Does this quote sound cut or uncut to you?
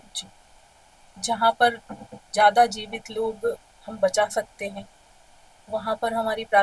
uncut